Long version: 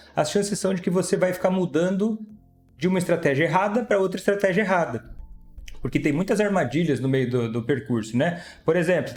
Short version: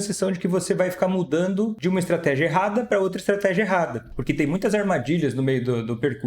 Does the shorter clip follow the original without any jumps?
no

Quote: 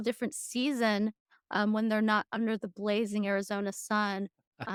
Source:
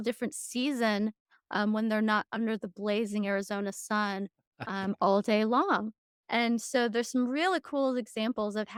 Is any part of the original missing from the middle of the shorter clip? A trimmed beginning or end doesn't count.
no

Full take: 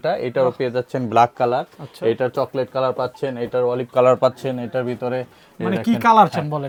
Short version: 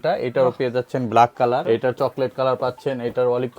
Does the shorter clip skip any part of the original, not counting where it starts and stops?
yes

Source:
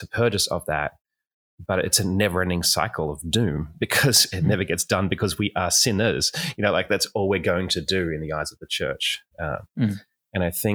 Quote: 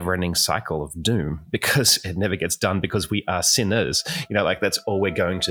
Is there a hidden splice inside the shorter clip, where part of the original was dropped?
no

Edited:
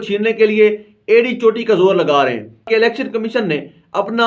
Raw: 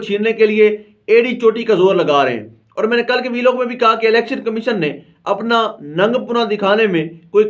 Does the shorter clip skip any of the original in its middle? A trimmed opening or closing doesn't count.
yes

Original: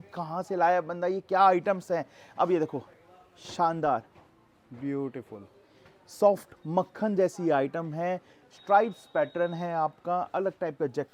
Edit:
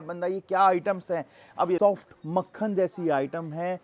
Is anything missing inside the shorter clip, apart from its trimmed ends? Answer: yes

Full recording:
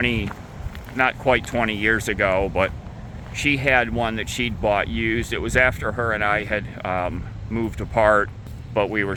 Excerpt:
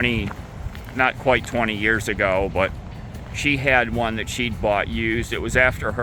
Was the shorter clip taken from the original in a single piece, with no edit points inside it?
yes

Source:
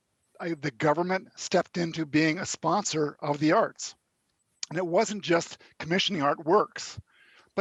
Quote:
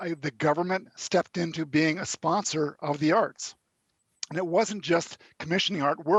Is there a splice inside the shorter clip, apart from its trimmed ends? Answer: no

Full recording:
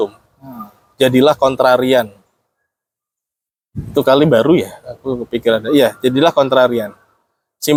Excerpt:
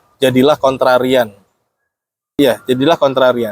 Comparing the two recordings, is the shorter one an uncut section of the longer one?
no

